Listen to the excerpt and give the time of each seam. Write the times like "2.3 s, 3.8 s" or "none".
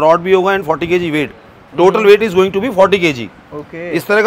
none